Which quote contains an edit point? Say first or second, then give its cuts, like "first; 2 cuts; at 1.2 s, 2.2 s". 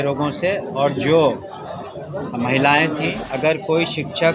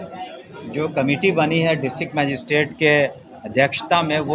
first; 1 cut; at 3.2 s